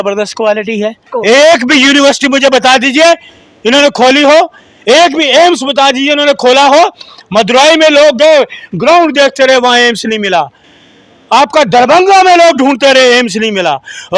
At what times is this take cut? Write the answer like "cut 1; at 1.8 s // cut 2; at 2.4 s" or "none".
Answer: cut 1; at 1.1 s